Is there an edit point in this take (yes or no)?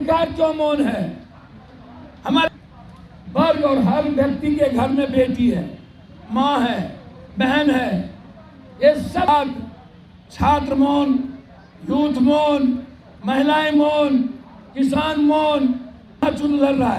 yes